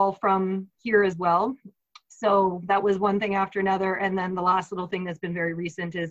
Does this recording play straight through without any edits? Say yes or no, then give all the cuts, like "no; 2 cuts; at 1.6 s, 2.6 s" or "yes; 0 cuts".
yes; 0 cuts